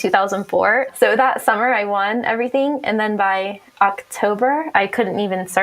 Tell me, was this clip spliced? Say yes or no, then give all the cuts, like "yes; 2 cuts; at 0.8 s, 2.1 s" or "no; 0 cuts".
yes; 2 cuts; at 0.9 s, 4.7 s